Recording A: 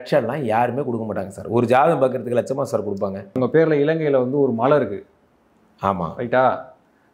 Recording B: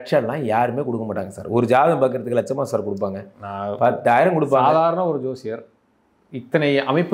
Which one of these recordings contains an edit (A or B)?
A